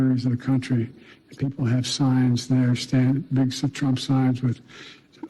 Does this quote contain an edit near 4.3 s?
no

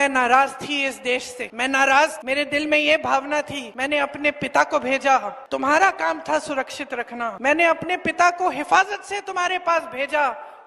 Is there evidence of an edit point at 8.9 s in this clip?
no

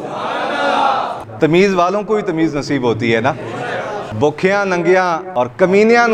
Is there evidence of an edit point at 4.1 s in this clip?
yes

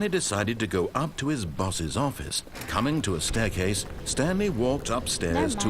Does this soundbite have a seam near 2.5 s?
yes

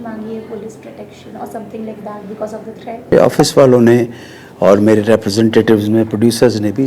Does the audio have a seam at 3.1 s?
yes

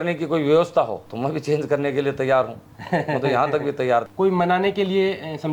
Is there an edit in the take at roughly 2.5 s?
no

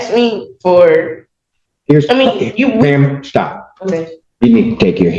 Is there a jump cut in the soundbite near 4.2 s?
yes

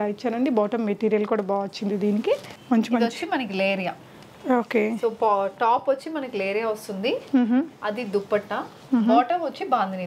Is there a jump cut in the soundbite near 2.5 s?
yes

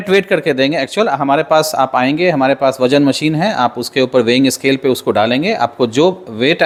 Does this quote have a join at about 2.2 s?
no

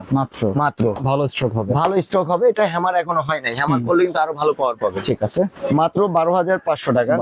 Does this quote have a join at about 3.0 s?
no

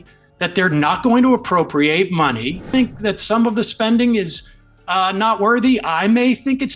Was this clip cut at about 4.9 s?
no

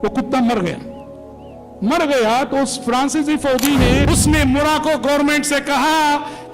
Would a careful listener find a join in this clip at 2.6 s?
no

